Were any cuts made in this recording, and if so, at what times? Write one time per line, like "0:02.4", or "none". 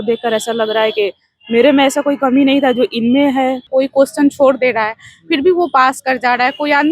0:03.7